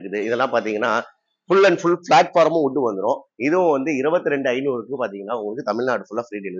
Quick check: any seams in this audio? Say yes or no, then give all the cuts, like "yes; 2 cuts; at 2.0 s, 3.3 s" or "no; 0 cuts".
no; 0 cuts